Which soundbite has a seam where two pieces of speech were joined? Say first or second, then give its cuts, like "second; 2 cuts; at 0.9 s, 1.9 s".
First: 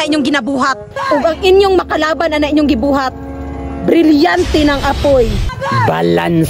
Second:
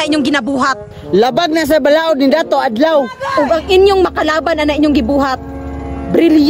first; 2 cuts; at 0.9 s, 5.5 s